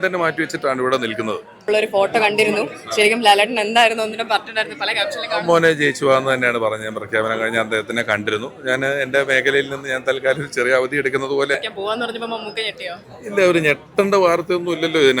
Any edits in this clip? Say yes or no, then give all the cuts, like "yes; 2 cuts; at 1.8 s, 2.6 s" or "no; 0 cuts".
yes; 2 cuts; at 1.7 s, 11.5 s